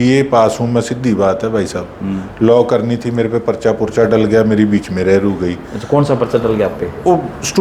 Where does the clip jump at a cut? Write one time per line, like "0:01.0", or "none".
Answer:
none